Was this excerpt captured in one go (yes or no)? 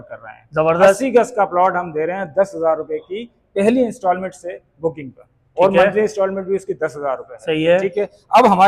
yes